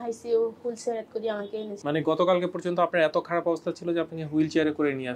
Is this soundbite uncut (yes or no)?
no